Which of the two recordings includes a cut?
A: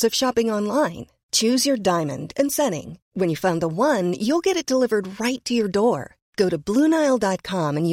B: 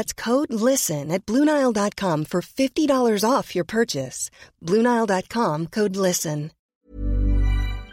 B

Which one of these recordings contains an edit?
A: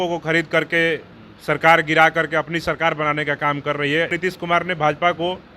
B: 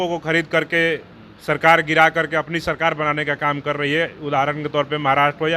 A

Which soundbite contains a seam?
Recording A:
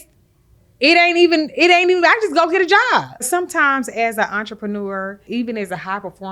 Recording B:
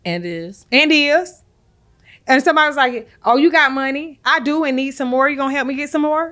A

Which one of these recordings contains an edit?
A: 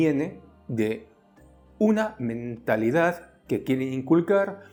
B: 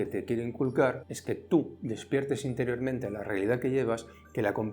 B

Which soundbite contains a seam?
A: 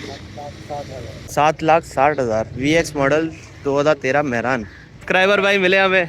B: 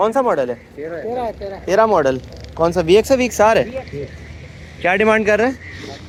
A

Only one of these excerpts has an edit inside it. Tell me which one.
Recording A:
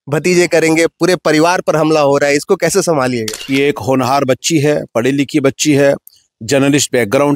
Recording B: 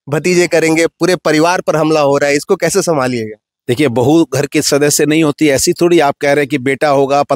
A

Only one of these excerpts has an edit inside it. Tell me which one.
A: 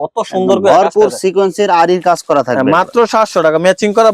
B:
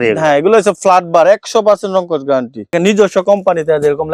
B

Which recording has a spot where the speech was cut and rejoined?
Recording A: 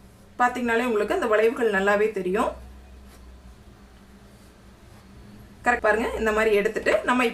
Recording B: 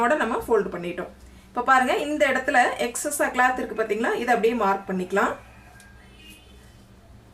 A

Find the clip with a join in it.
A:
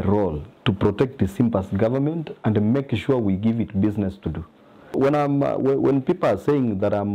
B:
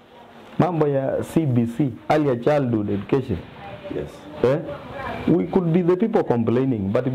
A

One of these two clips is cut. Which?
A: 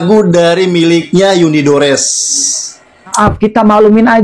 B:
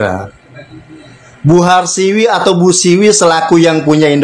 A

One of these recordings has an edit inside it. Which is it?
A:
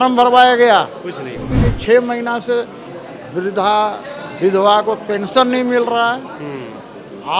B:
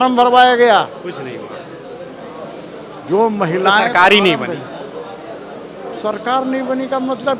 A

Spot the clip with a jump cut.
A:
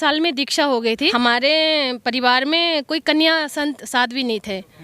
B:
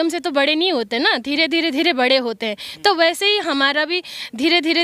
A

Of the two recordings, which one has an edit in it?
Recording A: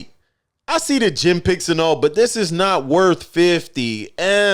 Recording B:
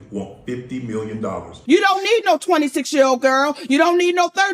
B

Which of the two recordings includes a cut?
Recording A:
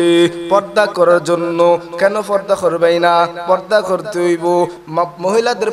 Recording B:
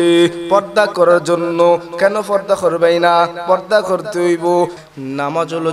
B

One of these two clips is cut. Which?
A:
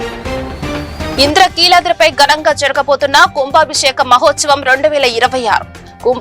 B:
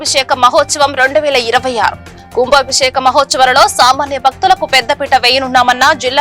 A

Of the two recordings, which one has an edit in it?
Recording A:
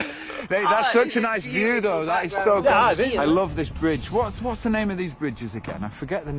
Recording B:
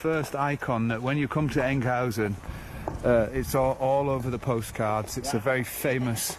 A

